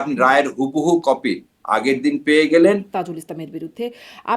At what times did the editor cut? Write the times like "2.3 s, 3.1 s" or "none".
2.9 s

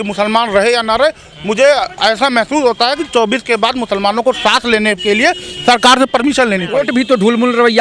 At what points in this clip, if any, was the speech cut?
6.8 s

